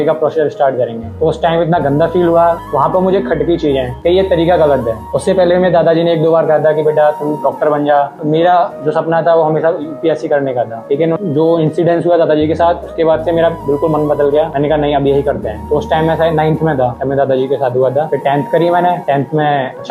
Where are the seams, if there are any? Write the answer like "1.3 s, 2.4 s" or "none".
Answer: 2.6 s, 15.6 s